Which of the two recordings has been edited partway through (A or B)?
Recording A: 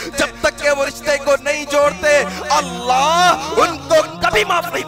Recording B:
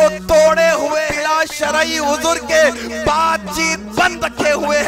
B